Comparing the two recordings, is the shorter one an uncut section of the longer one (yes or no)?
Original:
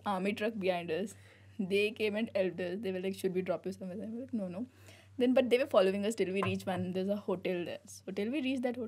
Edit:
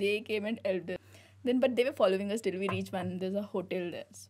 no